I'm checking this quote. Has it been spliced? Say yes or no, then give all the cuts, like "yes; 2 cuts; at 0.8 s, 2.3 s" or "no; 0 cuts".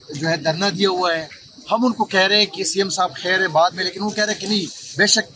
no; 0 cuts